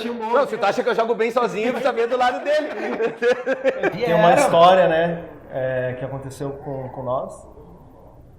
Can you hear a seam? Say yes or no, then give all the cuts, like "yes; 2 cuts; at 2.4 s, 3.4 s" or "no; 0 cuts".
yes; 1 cut; at 3.9 s